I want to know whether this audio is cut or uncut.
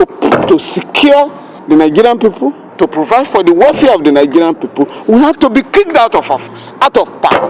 cut